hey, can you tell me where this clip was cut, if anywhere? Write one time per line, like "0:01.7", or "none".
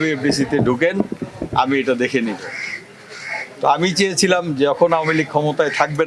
none